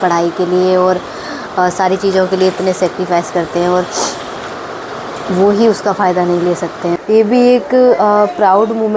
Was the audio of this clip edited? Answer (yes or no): yes